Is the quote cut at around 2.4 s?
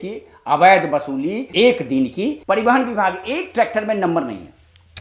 yes; 1 cut; at 2.4 s

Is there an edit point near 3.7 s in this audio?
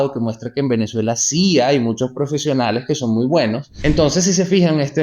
yes; 1 cut; at 3.7 s

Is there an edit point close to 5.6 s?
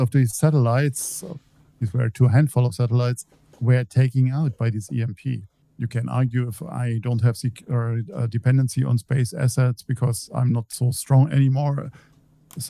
yes; 1 cut; at 5.6 s

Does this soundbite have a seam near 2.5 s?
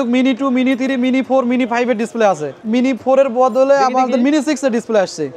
yes; 1 cut; at 2.5 s

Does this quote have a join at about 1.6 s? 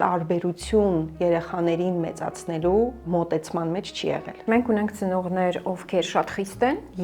no; 2 cuts; at 3.1 s, 4.4 s

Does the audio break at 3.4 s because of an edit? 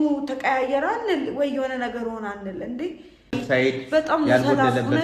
yes; 1 cut; at 3.4 s

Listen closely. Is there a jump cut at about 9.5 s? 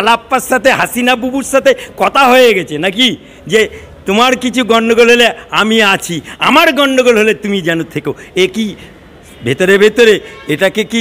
no; 0 cuts

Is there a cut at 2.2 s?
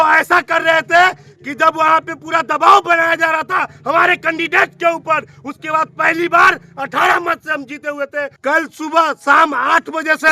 no; 1 cut; at 8.3 s

